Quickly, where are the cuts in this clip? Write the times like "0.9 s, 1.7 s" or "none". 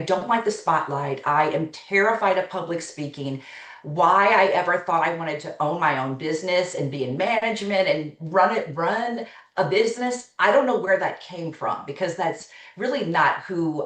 none